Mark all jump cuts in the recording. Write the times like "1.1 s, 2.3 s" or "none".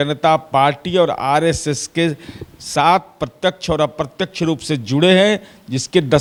none